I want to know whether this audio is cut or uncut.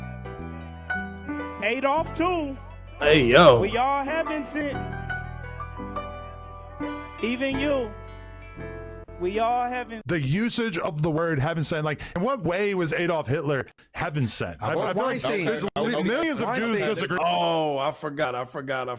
cut